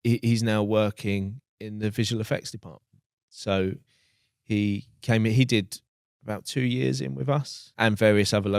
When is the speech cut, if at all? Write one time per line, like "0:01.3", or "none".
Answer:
0:07.7